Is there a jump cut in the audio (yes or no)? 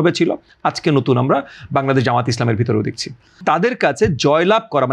yes